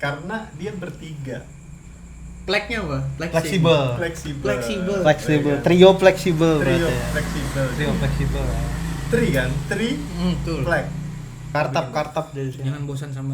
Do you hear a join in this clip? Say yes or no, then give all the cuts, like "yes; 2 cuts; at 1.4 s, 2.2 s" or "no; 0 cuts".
yes; 1 cut; at 11.3 s